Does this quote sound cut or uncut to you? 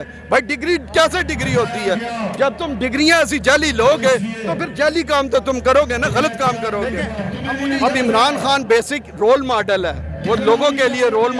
cut